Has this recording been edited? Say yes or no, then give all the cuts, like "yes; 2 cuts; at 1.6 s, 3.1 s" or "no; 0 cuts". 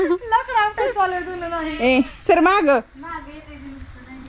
no; 0 cuts